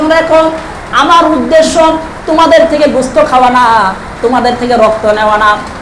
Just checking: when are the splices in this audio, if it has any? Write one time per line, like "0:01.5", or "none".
none